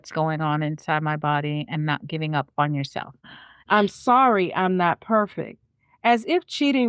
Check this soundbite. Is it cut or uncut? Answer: cut